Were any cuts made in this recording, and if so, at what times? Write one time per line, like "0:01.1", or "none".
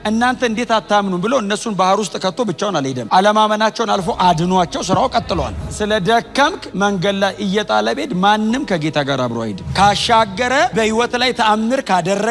0:05.6
0:09.6